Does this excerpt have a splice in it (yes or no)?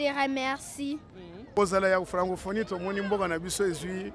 yes